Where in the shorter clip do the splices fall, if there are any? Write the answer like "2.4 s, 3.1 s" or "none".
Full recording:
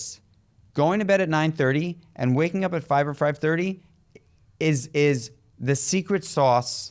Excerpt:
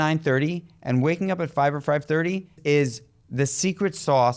2.6 s